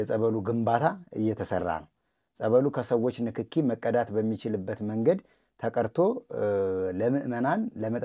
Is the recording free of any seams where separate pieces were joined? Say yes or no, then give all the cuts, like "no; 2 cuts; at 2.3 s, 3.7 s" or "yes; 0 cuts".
yes; 0 cuts